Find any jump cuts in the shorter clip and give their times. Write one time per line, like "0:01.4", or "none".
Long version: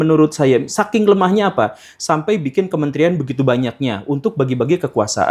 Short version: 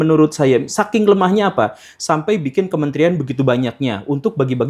none